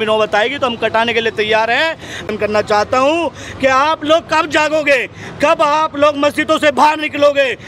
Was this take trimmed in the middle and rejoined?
yes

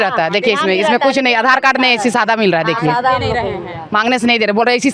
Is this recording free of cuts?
yes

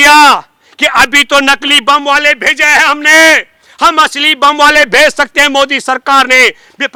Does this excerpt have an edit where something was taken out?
no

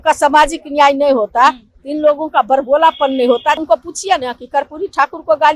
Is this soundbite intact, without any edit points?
no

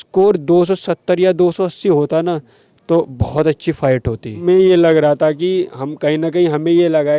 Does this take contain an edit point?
yes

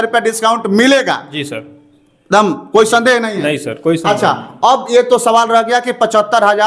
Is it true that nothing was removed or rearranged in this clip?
yes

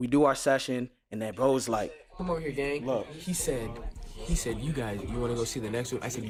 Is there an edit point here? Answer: no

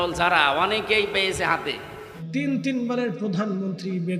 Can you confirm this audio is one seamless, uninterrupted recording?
no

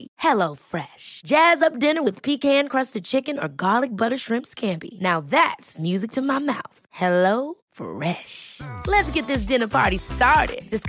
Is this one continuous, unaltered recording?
yes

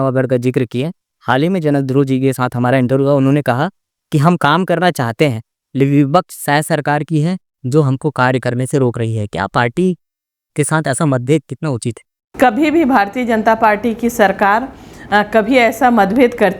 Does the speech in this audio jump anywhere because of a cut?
no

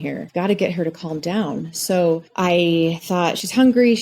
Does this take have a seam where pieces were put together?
no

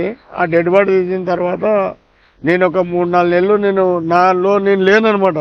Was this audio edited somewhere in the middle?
no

